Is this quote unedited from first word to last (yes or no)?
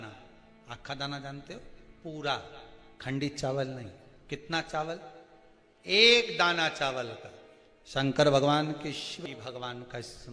no